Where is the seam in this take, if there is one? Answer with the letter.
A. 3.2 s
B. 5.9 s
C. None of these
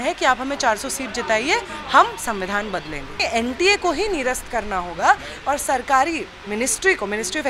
A